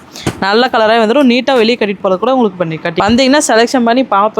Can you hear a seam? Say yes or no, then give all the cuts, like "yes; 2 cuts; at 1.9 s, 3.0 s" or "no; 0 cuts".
yes; 1 cut; at 2.9 s